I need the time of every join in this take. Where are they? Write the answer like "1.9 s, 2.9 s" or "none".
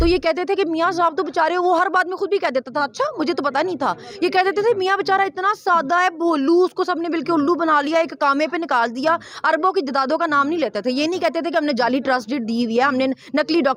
none